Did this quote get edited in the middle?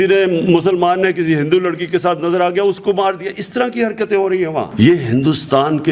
no; 0 cuts

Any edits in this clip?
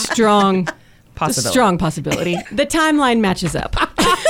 yes; 1 cut; at 2.4 s

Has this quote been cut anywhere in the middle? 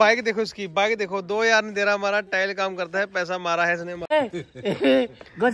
yes; 1 cut; at 4.1 s

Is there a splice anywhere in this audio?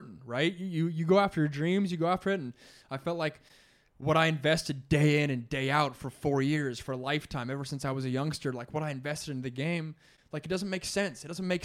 no; 0 cuts

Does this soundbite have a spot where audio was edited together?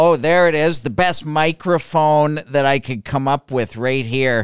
no; 0 cuts

